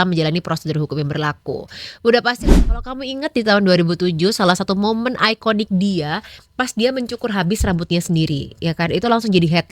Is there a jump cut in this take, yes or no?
yes